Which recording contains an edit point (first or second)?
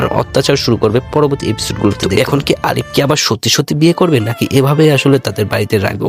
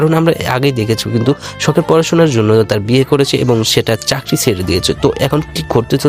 first